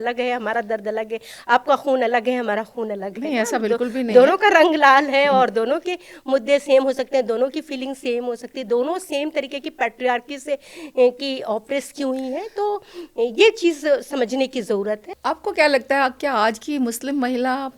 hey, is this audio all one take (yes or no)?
no